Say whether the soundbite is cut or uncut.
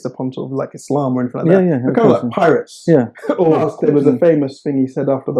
cut